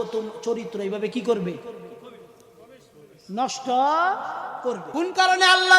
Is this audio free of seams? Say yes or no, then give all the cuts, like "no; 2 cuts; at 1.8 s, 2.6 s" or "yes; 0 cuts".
no; 1 cut; at 4.8 s